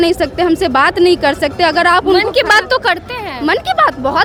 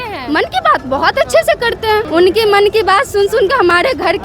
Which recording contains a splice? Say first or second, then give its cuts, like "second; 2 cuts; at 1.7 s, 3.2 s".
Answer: second; 1 cut; at 2.1 s